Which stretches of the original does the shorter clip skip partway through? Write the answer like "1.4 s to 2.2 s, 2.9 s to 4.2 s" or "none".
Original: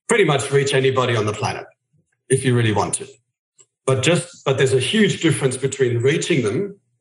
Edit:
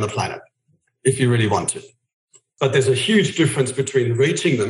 3.7 s to 4.3 s